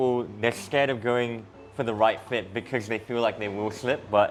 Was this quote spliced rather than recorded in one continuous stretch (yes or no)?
no